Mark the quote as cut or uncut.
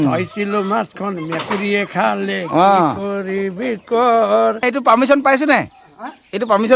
cut